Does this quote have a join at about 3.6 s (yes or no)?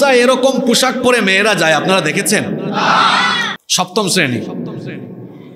yes